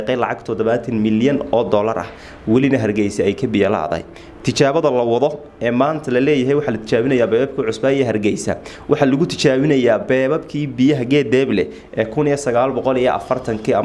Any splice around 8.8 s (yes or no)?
no